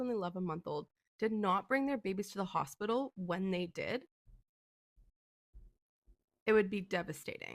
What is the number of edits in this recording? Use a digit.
0